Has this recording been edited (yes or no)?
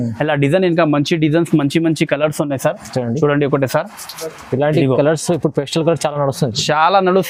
no